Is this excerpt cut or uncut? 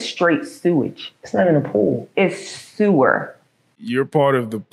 cut